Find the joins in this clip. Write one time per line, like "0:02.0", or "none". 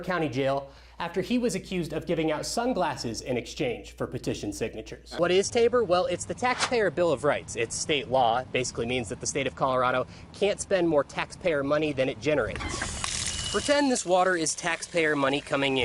0:05.0